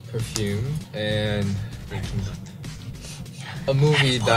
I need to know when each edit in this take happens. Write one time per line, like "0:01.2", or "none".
0:00.9
0:01.8

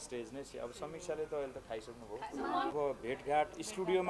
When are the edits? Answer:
0:02.7

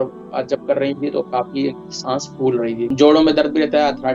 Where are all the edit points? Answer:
0:02.9

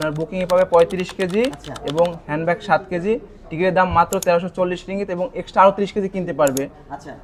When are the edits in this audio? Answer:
none

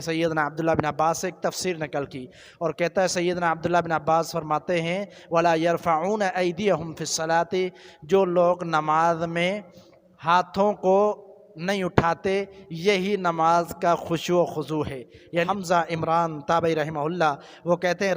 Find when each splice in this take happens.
0:15.5

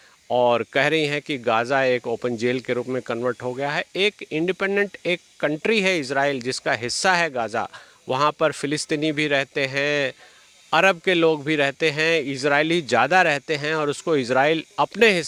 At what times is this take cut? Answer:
none

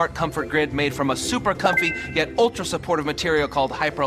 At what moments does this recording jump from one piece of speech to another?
none

